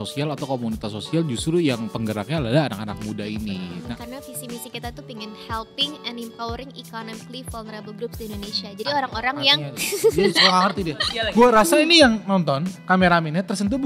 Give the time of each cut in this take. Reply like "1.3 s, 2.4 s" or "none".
3.8 s, 11.0 s